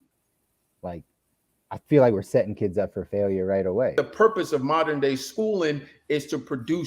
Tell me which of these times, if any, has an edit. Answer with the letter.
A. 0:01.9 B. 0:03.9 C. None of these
B